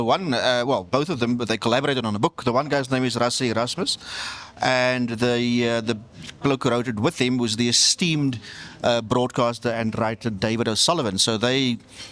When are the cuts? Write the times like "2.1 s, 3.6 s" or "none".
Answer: none